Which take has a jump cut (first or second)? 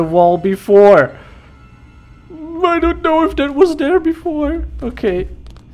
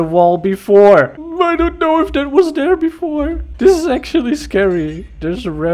second